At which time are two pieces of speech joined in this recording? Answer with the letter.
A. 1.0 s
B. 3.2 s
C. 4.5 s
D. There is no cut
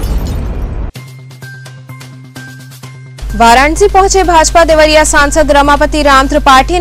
B